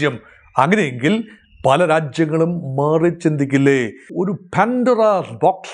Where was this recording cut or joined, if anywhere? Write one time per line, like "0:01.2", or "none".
0:04.0